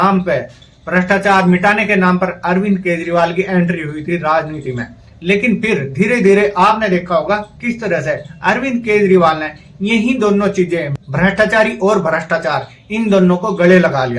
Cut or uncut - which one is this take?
uncut